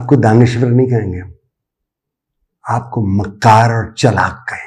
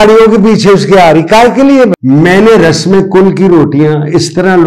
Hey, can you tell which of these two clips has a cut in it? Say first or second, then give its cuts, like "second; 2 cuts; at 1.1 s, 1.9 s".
second; 1 cut; at 1.9 s